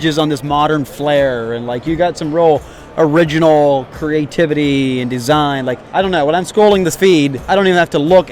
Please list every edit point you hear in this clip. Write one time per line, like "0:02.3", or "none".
0:05.8
0:07.4